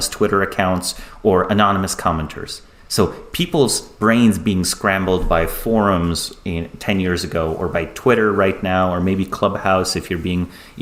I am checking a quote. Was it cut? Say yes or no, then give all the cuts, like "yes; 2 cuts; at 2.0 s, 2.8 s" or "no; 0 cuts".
no; 0 cuts